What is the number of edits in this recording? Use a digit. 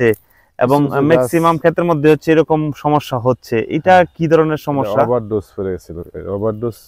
0